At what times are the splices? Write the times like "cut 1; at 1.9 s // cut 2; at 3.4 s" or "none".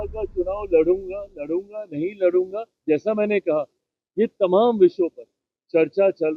none